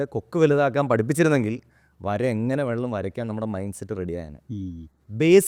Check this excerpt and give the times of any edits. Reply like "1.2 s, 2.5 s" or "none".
none